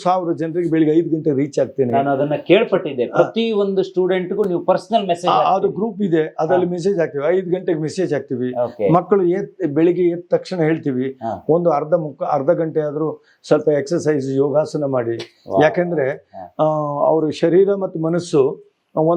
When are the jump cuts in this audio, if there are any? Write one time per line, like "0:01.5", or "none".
none